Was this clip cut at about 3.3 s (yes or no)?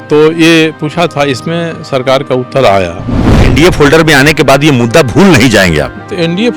yes